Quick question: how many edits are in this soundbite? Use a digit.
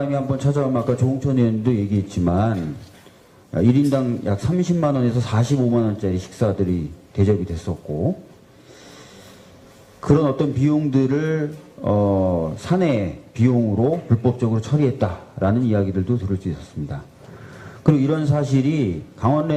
0